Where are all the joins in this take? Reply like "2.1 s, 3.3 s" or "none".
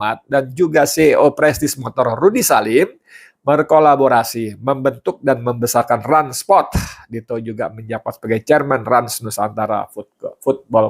none